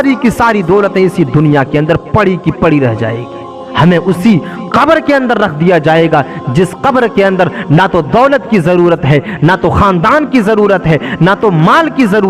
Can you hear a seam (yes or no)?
yes